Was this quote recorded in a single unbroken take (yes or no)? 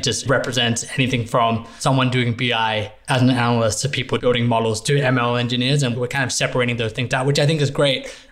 no